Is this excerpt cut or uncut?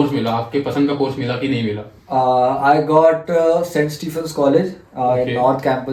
uncut